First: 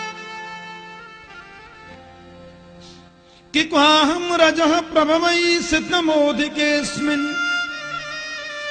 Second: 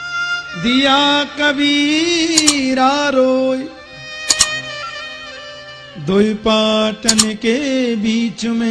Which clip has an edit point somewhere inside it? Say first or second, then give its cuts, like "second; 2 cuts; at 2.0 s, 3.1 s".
first; 1 cut; at 1.9 s